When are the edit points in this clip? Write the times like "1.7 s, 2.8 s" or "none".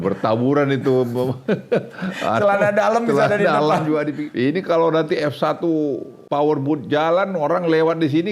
4.2 s, 6.1 s

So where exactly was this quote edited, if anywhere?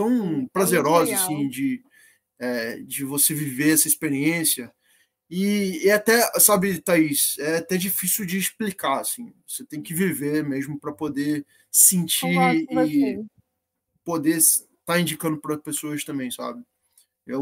none

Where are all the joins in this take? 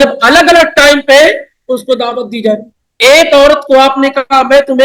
2.9 s

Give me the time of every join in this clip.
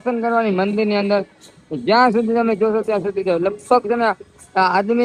none

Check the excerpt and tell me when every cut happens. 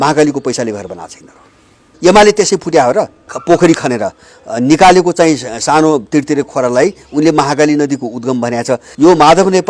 1.8 s, 3.3 s, 8.8 s

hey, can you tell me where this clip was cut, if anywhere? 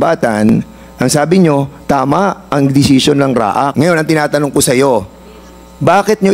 3.7 s

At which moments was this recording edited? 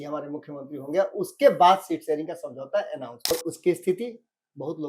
3.3 s

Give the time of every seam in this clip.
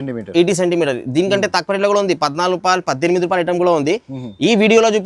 none

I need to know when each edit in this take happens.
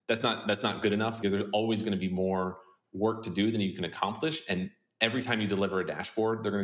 1.2 s

